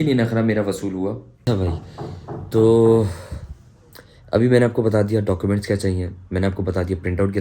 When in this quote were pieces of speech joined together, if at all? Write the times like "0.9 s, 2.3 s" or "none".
1.4 s